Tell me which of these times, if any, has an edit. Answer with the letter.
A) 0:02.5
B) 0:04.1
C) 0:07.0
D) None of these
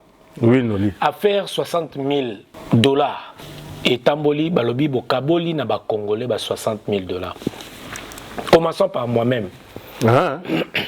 A